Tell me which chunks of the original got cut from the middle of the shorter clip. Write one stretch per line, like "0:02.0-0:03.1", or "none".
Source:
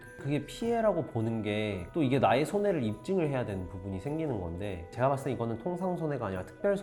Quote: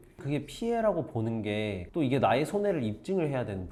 none